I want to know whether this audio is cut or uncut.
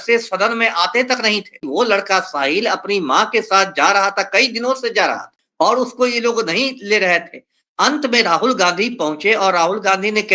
cut